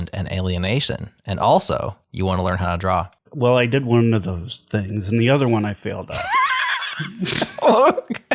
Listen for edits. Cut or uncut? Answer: cut